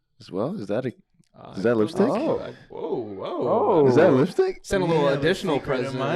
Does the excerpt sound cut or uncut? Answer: uncut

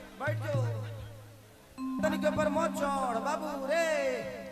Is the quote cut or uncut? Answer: cut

